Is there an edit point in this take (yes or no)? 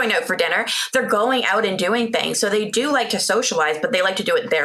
no